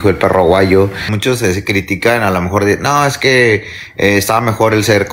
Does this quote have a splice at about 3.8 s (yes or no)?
no